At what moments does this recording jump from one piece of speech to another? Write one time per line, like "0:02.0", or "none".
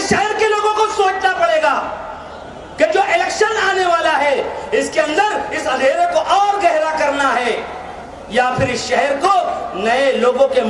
none